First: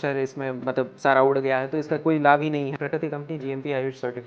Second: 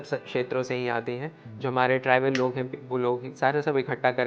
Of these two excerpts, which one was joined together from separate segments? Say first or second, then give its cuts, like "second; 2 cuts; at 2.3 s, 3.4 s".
first; 1 cut; at 2.8 s